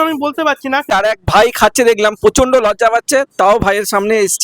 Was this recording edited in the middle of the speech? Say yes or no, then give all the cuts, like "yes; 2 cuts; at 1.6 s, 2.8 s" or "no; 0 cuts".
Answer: yes; 1 cut; at 0.9 s